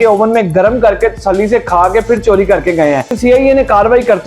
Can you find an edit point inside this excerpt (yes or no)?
yes